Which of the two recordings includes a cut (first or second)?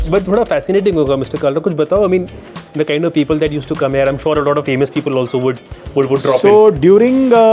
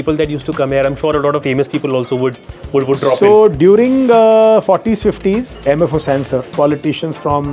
second